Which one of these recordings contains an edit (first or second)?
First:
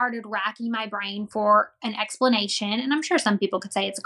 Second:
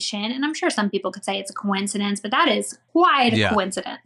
second